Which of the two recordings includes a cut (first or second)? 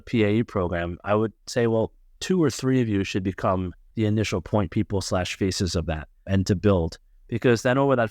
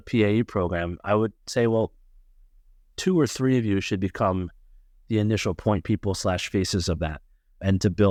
first